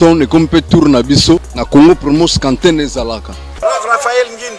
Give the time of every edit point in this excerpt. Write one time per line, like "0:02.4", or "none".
0:01.5
0:03.5